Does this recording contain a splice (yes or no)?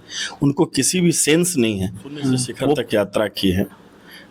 yes